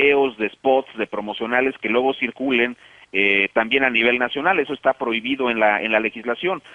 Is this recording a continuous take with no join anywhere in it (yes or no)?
yes